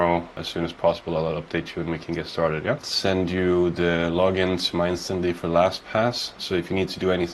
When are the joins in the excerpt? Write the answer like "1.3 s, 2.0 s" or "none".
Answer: 2.9 s